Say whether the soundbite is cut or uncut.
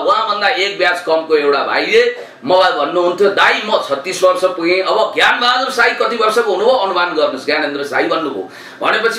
uncut